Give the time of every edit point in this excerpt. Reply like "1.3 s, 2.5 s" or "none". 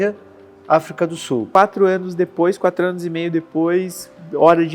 1.5 s